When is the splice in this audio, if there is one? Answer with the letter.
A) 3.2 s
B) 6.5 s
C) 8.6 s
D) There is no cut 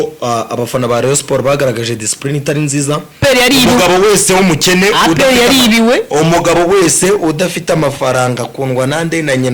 A